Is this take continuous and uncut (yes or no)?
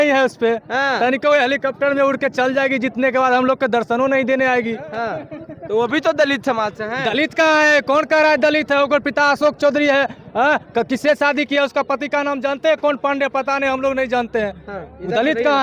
yes